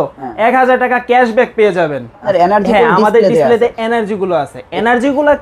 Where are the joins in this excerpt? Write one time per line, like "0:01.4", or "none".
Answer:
0:02.2